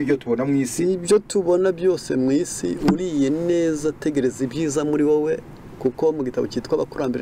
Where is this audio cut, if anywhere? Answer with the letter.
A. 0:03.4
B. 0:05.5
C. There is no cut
C